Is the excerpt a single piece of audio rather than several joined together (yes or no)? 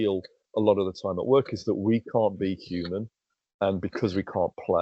yes